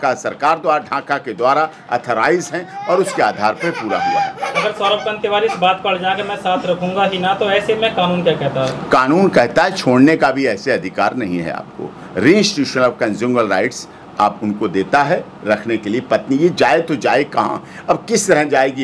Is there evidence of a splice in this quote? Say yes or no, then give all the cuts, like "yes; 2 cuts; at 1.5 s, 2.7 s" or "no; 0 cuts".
no; 0 cuts